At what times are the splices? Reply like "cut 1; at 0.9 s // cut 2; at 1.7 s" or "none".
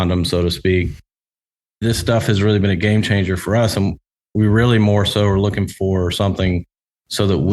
cut 1; at 1.3 s